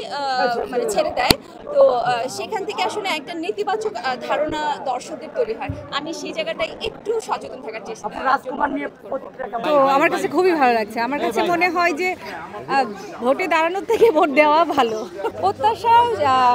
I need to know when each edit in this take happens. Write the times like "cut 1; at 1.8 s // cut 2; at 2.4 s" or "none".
cut 1; at 9.6 s // cut 2; at 15.3 s